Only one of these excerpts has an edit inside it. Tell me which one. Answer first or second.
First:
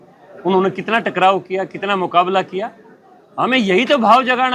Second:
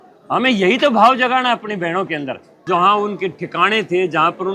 second